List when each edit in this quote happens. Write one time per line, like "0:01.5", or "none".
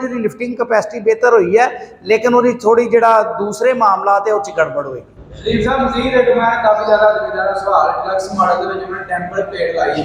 none